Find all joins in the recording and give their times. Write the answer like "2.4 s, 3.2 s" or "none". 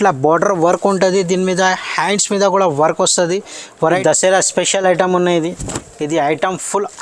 3.8 s